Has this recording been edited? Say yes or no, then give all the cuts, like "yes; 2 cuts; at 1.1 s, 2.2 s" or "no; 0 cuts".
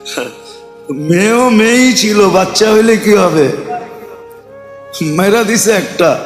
no; 0 cuts